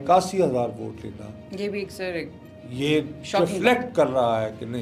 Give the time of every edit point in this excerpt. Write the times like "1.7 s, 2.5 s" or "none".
none